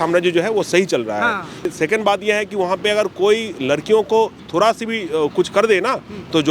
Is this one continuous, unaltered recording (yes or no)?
no